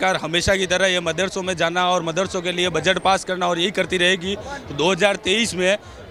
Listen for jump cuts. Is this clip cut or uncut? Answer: uncut